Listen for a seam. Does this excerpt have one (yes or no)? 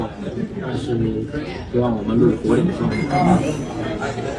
no